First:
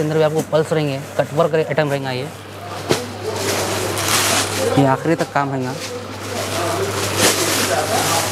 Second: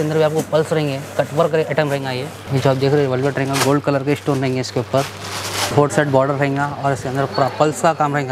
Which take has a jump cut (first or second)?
second